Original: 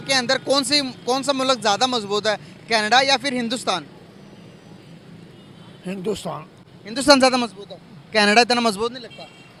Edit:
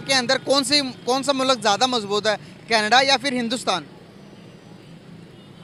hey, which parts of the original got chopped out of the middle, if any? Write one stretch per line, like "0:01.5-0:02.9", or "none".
none